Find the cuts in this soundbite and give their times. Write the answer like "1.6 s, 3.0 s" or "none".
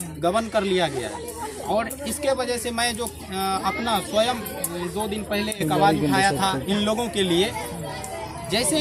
none